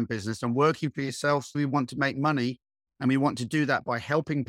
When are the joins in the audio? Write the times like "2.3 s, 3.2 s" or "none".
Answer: 1.6 s